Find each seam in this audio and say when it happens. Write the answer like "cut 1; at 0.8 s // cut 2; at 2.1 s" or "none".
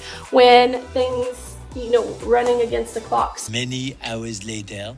cut 1; at 3.3 s